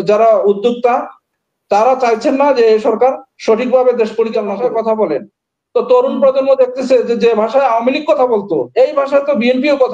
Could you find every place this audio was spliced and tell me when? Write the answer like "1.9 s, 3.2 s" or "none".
4.6 s